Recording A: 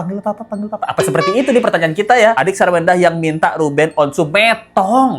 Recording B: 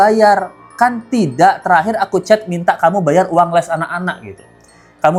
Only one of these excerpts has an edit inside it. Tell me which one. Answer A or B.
A